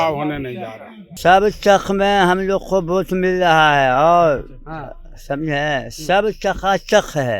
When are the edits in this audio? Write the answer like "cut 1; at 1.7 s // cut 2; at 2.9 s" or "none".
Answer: cut 1; at 1.1 s